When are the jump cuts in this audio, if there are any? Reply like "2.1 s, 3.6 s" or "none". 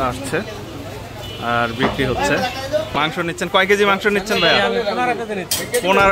2.9 s